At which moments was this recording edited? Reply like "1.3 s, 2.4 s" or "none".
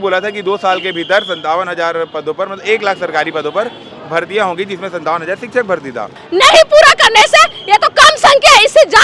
6.2 s